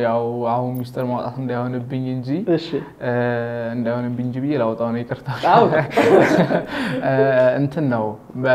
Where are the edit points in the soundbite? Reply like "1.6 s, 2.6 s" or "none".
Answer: none